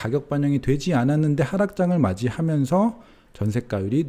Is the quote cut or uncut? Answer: uncut